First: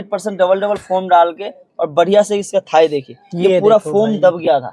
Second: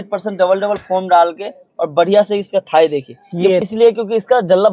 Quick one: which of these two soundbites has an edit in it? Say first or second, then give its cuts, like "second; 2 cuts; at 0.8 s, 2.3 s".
second; 1 cut; at 3.6 s